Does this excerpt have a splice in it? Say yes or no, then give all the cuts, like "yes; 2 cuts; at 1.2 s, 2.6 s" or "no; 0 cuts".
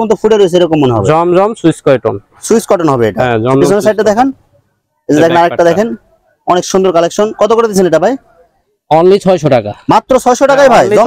no; 0 cuts